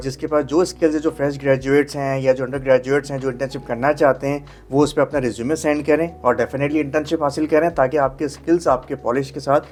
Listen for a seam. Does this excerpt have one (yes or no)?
no